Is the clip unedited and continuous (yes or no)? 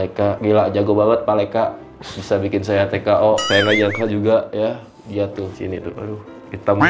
no